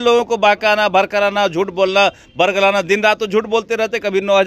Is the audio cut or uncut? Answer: uncut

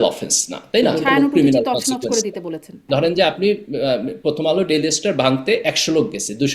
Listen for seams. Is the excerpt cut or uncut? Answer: cut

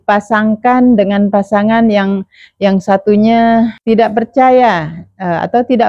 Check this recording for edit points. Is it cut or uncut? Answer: cut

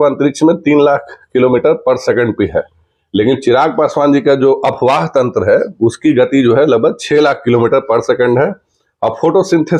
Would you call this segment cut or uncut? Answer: uncut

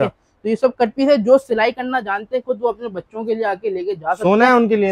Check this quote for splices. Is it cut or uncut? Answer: uncut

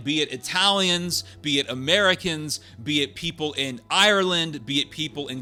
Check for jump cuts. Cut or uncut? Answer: uncut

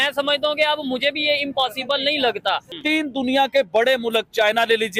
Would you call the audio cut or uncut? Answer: cut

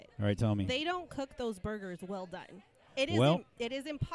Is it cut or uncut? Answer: uncut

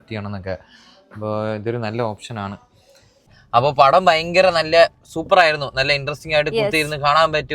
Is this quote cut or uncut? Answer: cut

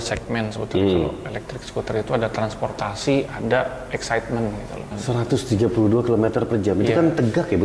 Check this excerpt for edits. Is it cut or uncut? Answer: cut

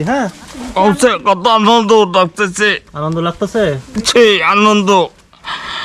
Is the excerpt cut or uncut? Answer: uncut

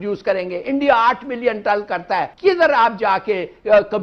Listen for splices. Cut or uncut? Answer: cut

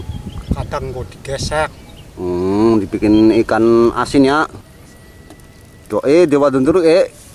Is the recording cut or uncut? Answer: cut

